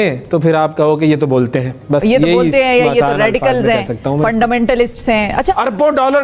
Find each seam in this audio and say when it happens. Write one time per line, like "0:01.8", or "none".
0:05.3